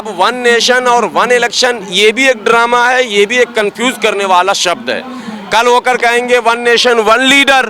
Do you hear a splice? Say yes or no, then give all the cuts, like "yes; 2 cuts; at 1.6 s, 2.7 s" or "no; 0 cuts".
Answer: no; 0 cuts